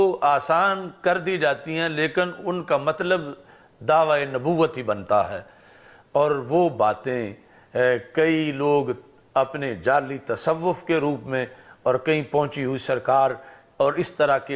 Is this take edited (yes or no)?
no